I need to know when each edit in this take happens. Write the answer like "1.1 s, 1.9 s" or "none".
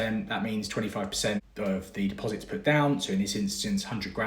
1.4 s

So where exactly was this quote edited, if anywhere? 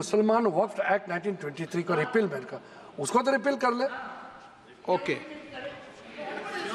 none

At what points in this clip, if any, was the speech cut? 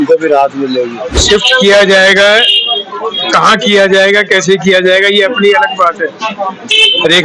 1.2 s

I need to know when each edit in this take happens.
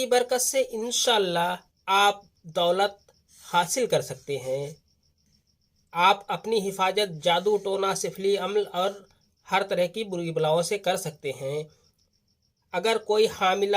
1.7 s

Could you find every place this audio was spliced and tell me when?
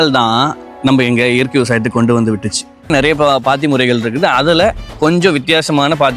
2.9 s

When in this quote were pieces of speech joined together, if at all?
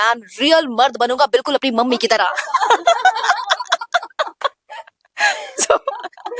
none

